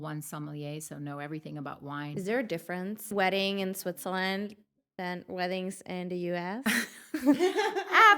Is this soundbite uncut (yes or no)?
no